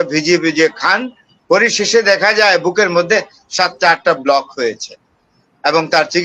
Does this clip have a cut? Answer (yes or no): no